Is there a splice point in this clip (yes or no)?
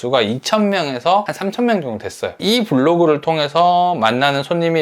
yes